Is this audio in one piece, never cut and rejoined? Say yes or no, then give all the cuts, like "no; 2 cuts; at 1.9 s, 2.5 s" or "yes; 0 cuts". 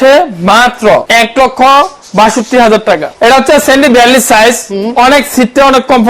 no; 2 cuts; at 1.1 s, 3.1 s